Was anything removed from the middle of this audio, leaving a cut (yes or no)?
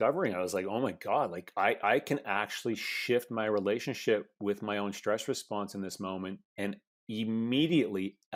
no